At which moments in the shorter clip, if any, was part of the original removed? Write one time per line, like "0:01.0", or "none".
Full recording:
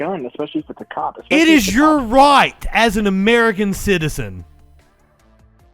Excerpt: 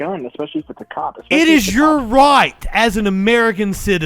none